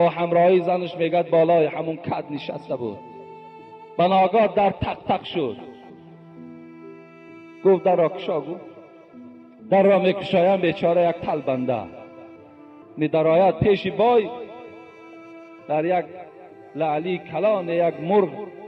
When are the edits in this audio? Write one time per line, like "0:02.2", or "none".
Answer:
0:05.8
0:07.4